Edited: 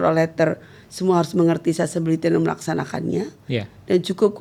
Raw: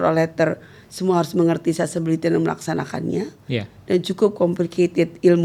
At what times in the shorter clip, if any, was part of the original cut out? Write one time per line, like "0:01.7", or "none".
none